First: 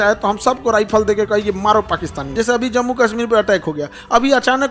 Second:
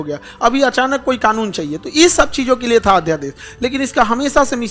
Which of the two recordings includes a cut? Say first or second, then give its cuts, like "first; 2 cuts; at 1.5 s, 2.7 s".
first; 1 cut; at 2.3 s